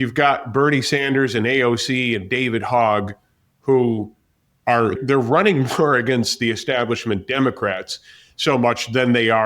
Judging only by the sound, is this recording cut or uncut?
cut